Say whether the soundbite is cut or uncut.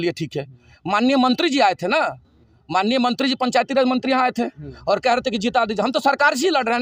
uncut